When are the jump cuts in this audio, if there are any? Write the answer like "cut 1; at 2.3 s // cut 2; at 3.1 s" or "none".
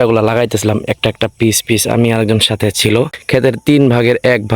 cut 1; at 3.2 s